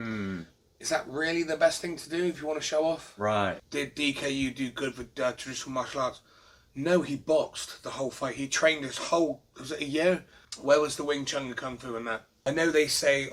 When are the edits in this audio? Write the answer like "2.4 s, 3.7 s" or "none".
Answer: 3.6 s, 12.3 s